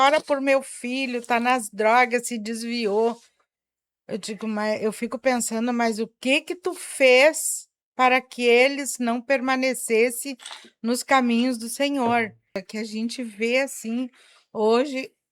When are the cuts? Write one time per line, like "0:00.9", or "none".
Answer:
0:12.7

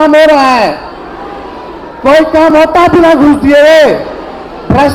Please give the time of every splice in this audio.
none

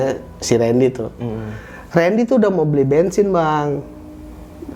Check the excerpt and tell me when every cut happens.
none

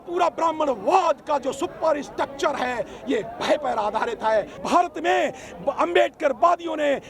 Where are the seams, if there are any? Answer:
0:04.6

